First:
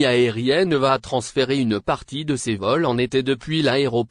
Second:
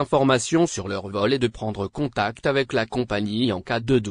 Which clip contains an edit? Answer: first; 1 cut; at 1.1 s

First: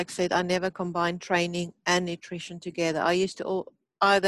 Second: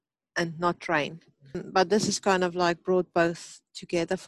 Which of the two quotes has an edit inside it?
second; 1 cut; at 1.6 s

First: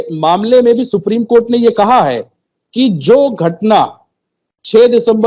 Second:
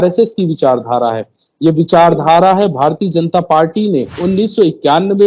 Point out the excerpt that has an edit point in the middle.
second; 1 cut; at 4.2 s

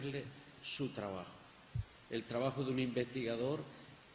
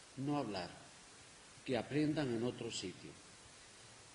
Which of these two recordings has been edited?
second; 1 cut; at 1.5 s

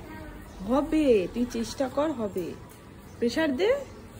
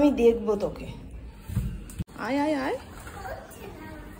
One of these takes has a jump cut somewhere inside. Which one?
second; 1 cut; at 2.0 s

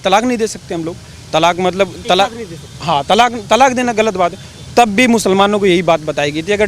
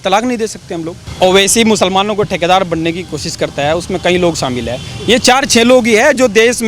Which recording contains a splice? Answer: second; 1 cut; at 1.0 s

